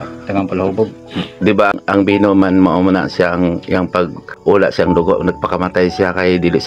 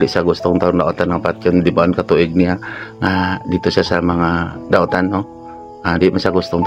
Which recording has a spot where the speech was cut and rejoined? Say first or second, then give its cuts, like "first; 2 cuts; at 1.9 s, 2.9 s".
first; 2 cuts; at 1.8 s, 4.2 s